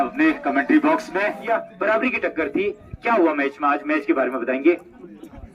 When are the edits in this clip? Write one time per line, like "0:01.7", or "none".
0:01.4